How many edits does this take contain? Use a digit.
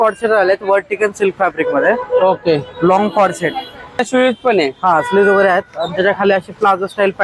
1